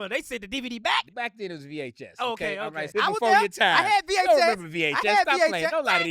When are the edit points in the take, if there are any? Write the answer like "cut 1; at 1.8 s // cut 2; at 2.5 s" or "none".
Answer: cut 1; at 1.1 s // cut 2; at 2.9 s